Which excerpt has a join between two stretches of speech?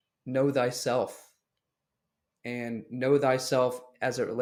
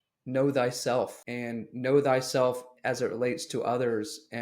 second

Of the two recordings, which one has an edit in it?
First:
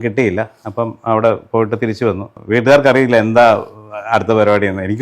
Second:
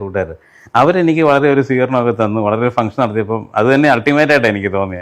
first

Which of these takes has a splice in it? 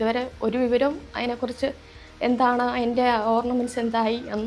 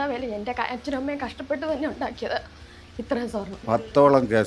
second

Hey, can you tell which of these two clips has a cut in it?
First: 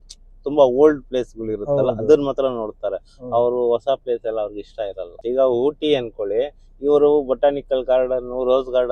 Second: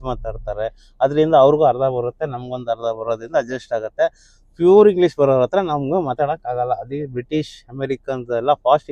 first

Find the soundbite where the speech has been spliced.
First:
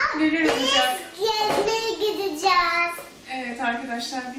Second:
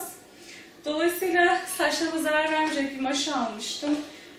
second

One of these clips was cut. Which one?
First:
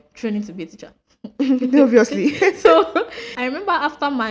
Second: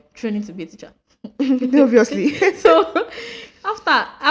first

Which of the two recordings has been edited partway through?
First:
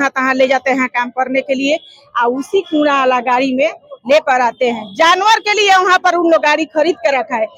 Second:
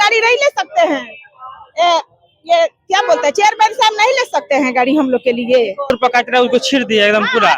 second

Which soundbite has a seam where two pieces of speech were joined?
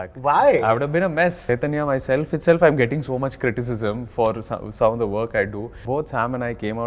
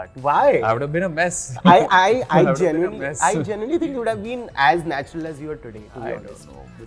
first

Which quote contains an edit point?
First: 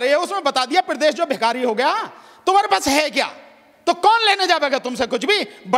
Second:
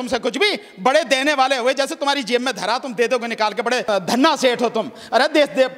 second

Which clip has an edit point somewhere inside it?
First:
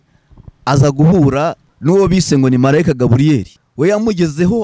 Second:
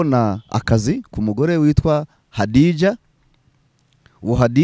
first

